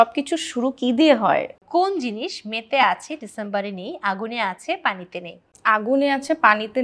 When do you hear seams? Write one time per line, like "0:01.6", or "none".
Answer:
0:01.6
0:05.4